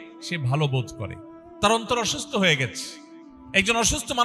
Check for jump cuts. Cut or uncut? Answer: uncut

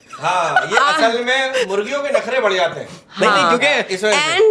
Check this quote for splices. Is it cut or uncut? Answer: uncut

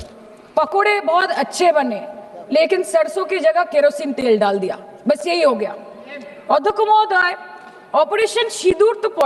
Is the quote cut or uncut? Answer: uncut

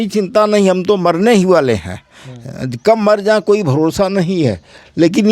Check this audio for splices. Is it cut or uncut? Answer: uncut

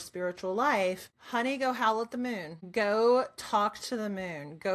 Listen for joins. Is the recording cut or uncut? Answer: cut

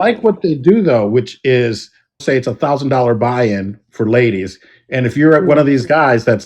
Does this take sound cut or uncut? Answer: cut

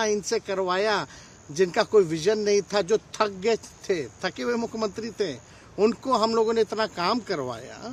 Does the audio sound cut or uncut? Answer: uncut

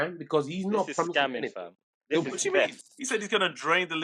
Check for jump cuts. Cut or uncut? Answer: uncut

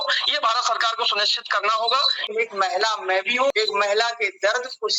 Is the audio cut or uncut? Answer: cut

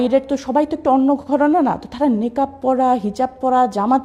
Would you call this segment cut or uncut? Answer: uncut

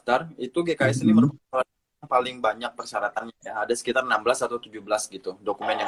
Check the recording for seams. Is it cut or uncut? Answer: uncut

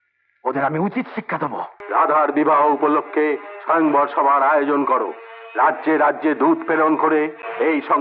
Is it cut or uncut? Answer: cut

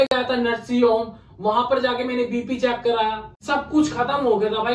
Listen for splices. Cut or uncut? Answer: cut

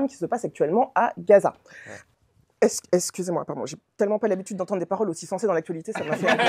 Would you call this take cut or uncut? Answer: uncut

